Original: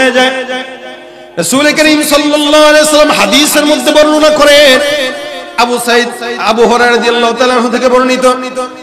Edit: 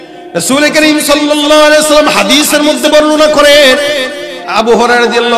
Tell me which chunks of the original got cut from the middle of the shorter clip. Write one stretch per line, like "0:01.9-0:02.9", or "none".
0:05.4-0:06.2